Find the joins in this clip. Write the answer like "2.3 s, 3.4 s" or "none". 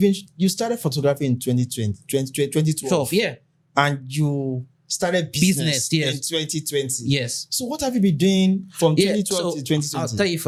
none